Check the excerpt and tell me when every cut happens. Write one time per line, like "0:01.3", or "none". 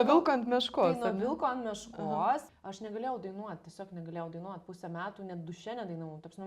0:02.5